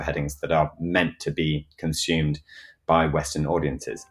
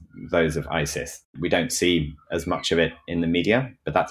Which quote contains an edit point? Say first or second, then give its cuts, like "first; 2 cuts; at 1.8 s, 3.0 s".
second; 1 cut; at 1.3 s